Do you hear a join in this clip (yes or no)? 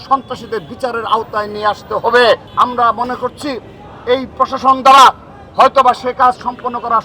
yes